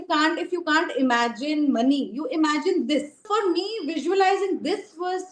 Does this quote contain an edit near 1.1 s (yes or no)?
no